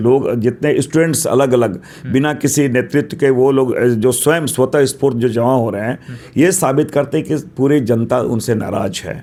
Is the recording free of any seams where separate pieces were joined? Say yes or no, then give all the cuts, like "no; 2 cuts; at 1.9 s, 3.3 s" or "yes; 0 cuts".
yes; 0 cuts